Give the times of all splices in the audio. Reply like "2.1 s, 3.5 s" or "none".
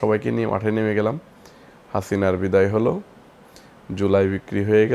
none